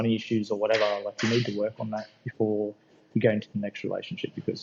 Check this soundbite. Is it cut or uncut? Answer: uncut